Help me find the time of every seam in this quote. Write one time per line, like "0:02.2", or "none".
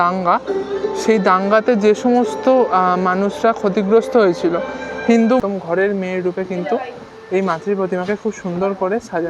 0:05.4